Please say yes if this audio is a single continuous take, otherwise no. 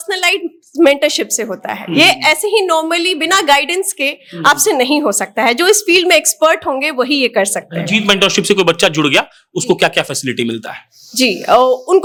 yes